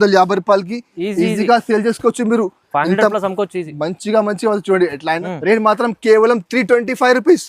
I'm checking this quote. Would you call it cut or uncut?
cut